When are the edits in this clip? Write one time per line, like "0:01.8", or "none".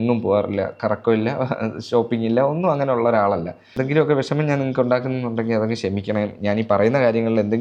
0:03.7